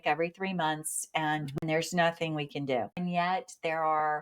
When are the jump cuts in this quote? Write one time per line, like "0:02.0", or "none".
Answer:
0:01.6
0:03.0